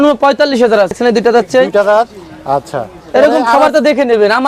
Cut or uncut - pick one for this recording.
cut